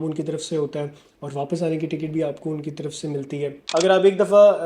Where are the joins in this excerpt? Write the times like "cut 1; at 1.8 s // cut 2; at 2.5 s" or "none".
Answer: cut 1; at 3.6 s